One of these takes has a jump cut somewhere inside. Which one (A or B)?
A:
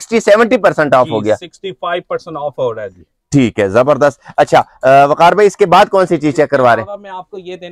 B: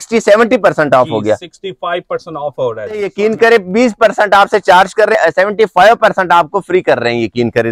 B